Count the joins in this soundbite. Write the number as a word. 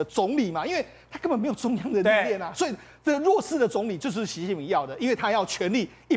zero